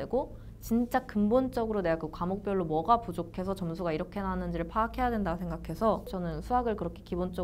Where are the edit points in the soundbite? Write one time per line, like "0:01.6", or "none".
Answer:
0:06.1